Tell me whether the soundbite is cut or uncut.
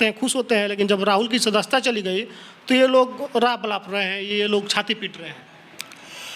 uncut